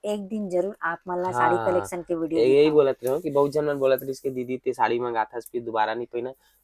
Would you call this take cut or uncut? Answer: uncut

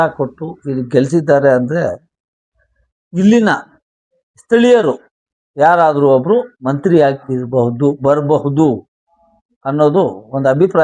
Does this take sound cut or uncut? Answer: uncut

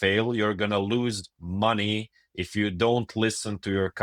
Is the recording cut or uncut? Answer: uncut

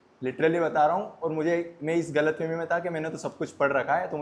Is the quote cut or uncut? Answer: uncut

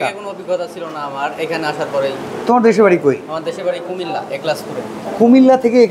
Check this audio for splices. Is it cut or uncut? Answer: uncut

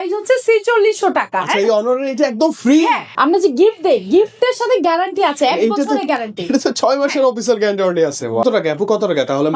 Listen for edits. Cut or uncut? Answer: cut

